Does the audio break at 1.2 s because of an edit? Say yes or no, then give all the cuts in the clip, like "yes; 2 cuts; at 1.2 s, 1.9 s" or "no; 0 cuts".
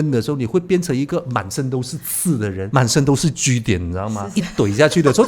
no; 2 cuts; at 2.6 s, 4.2 s